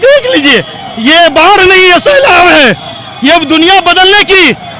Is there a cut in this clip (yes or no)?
no